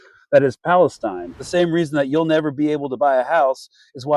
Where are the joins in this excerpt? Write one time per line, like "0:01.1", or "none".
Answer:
0:01.3